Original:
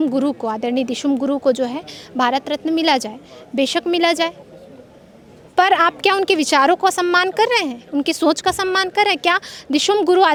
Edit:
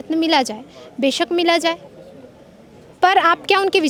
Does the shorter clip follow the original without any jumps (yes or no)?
yes